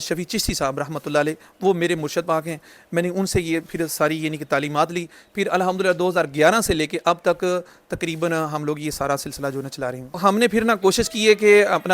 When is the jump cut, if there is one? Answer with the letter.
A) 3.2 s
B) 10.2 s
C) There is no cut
B